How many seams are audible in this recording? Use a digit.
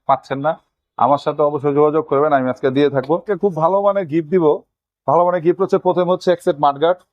1